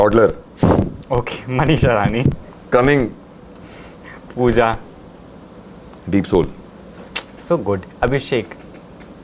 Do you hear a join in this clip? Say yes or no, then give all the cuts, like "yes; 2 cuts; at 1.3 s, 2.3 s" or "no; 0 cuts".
no; 0 cuts